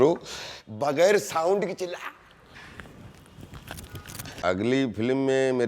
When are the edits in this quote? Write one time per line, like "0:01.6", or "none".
0:04.4